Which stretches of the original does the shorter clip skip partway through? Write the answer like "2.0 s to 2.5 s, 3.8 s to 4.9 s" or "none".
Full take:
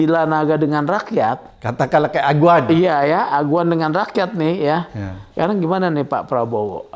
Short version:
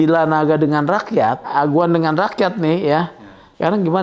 1.5 s to 3.3 s